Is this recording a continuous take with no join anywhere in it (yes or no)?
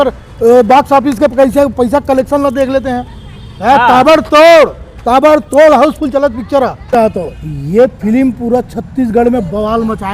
no